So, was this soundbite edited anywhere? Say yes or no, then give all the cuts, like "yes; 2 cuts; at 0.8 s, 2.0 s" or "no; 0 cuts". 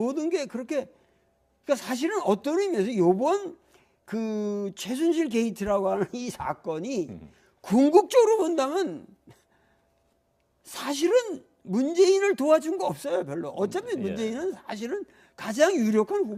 no; 0 cuts